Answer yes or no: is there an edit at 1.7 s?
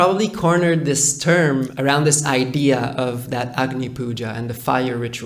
yes